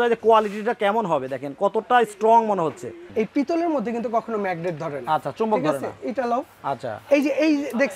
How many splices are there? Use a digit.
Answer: 1